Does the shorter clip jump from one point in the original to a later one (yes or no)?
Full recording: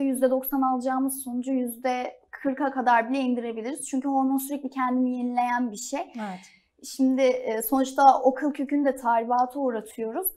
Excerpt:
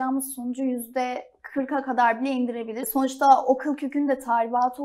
yes